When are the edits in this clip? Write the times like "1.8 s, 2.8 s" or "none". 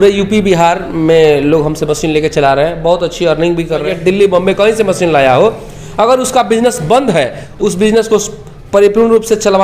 3.9 s, 7.4 s

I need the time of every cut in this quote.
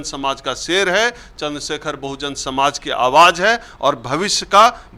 none

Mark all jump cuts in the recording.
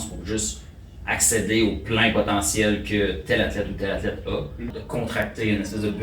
4.7 s

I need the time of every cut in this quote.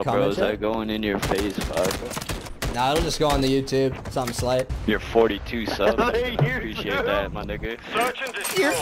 2.4 s, 4.5 s

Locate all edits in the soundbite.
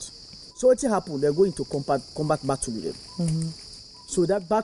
none

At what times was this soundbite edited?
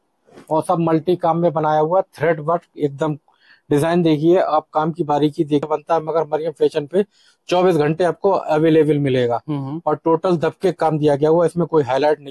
5.6 s

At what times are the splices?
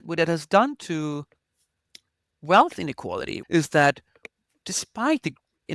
3.3 s

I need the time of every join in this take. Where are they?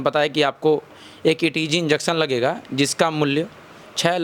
none

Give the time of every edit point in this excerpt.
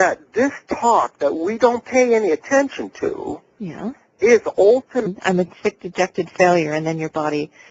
none

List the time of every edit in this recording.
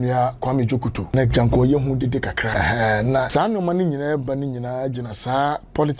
1.0 s, 2.5 s, 3.3 s

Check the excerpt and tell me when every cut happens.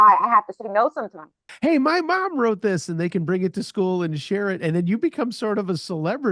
1.5 s

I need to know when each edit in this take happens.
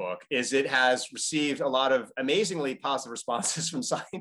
none

